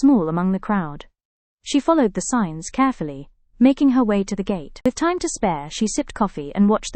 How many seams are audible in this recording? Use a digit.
1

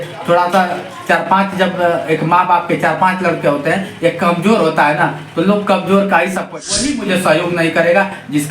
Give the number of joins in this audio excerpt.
1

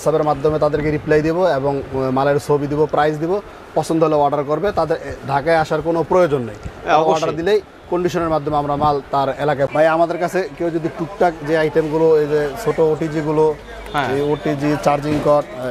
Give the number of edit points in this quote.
1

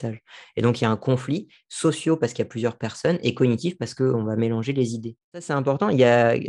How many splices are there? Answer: 1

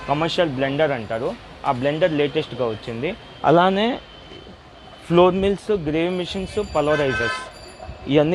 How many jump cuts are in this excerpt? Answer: 0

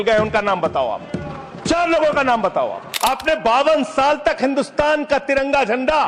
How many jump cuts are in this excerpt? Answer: 1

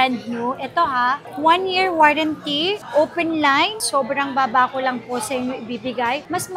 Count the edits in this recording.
1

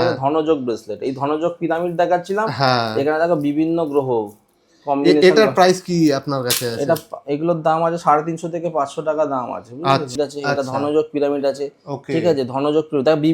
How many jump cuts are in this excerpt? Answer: 1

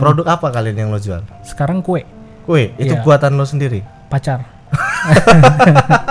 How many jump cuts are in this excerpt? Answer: 0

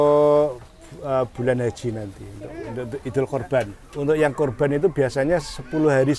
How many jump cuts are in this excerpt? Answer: 1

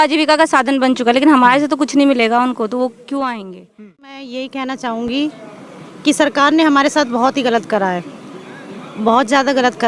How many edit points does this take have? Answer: 1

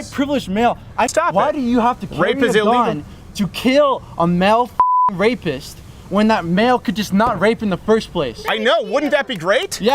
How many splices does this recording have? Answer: 1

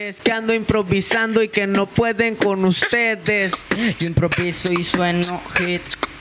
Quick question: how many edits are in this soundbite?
1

